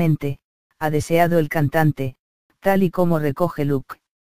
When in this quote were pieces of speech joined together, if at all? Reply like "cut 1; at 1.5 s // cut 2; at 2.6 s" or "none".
cut 1; at 3.3 s